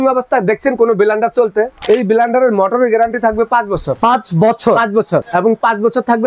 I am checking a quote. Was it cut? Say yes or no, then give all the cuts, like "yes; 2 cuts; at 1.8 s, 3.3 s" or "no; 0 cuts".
yes; 3 cuts; at 1.8 s, 3.9 s, 5.3 s